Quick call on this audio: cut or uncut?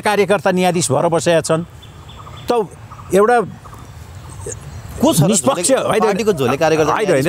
uncut